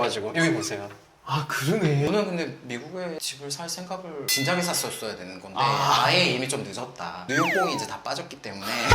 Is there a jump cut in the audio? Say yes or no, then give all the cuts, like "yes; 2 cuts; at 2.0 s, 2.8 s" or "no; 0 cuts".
yes; 1 cut; at 2.1 s